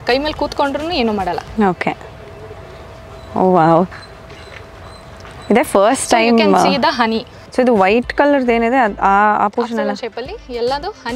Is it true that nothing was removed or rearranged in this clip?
no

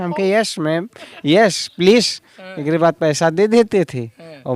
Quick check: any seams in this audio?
no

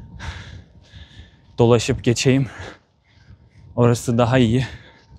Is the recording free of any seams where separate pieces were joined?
yes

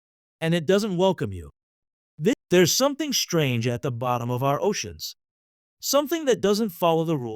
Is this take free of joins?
no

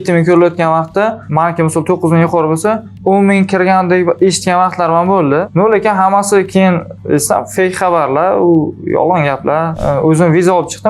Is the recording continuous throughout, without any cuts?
no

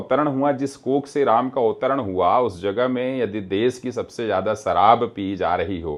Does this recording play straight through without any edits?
yes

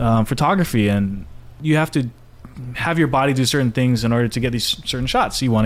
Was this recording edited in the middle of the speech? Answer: yes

